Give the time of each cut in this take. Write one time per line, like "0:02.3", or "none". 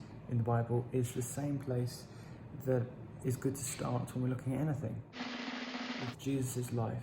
0:05.0
0:06.2